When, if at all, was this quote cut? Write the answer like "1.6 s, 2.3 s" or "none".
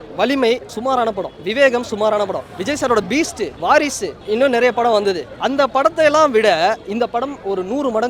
1.0 s, 2.5 s, 3.5 s, 4.2 s, 5.3 s